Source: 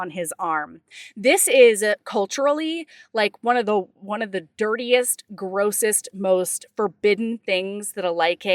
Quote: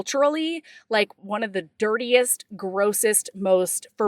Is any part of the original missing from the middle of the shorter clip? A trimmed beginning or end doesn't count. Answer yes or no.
yes